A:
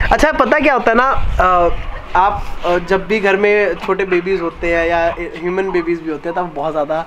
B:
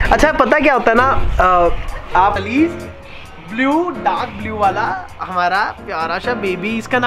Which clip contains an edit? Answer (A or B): B